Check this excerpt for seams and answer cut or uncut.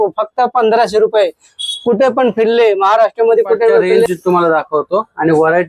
cut